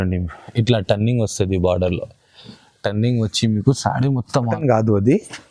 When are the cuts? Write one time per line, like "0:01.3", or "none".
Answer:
0:04.5